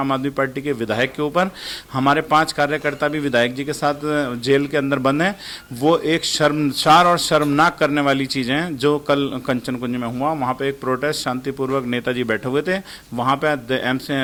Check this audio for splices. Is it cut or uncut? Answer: uncut